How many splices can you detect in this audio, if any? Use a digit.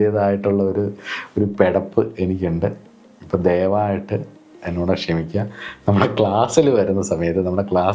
0